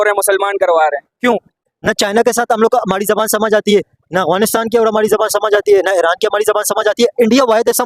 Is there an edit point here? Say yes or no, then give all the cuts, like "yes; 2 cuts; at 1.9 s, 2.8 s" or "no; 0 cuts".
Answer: yes; 1 cut; at 1.6 s